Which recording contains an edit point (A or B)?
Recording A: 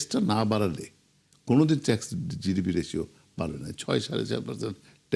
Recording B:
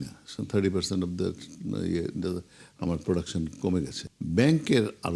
B